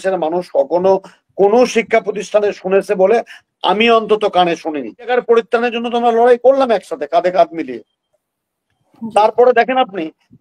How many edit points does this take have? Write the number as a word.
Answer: one